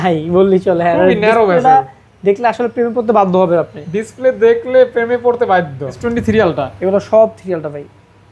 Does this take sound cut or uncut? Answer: cut